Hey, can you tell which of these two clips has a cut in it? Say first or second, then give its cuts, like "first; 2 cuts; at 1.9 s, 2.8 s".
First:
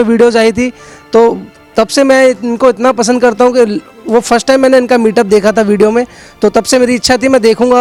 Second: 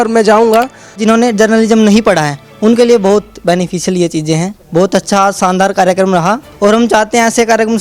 second; 3 cuts; at 1.0 s, 4.6 s, 6.5 s